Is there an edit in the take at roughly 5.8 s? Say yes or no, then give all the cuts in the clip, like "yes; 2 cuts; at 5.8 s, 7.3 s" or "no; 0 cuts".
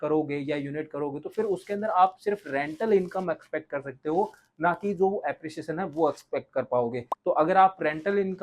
no; 1 cut; at 7.1 s